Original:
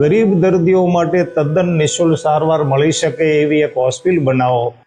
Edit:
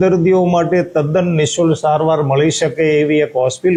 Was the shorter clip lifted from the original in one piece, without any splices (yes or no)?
yes